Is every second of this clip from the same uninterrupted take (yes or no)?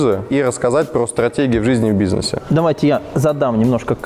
no